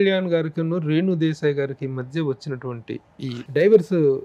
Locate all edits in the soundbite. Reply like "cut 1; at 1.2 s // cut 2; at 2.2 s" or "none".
none